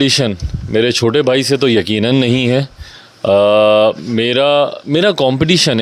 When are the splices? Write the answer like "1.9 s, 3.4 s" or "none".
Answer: none